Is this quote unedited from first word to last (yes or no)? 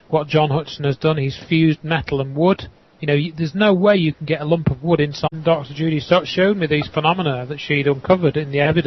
yes